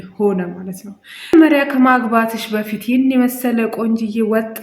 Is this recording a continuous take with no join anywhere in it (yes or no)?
no